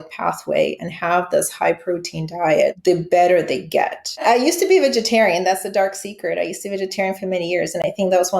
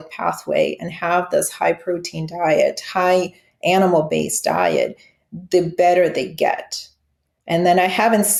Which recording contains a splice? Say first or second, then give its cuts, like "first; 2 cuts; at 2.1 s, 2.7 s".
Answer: first; 2 cuts; at 2.8 s, 4.2 s